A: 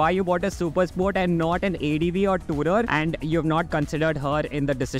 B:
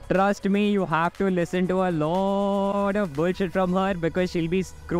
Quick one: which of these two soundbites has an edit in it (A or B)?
A